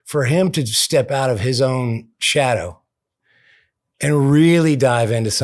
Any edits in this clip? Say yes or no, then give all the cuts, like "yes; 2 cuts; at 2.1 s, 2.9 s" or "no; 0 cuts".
yes; 1 cut; at 2.1 s